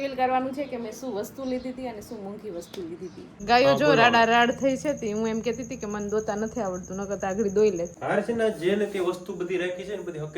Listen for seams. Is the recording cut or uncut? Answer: cut